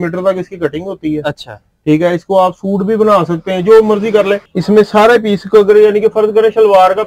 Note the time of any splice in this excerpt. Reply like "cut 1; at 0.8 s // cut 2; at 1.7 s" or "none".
cut 1; at 4.4 s